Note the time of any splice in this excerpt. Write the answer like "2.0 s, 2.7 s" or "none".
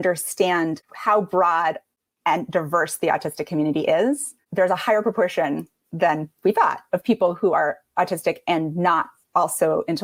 none